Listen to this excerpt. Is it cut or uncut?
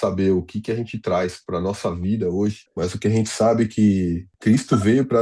cut